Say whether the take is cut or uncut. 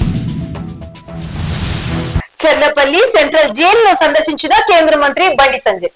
cut